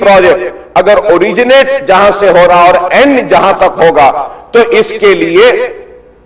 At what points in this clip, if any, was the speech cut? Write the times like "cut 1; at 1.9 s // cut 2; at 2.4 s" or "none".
none